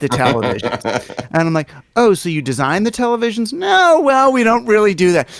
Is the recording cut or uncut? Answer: uncut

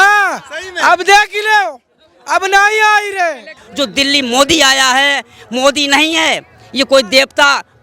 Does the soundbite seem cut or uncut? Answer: cut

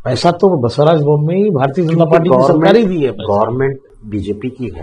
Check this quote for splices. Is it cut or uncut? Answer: cut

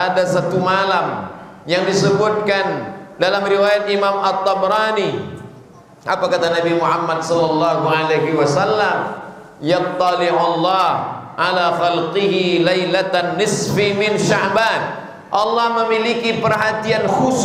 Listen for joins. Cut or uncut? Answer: uncut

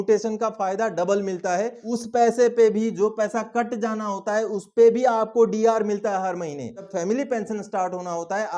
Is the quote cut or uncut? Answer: cut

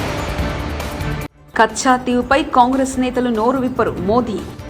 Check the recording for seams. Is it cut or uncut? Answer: cut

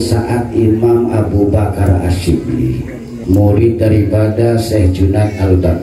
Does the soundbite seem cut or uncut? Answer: cut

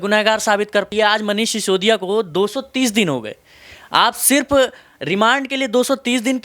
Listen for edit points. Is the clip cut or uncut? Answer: cut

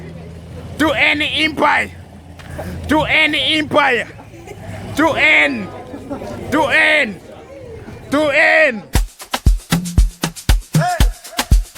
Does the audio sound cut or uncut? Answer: cut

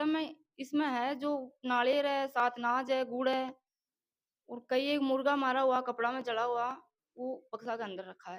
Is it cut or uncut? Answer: uncut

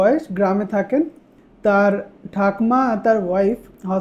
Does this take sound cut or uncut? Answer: uncut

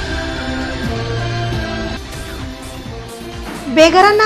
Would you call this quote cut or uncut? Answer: cut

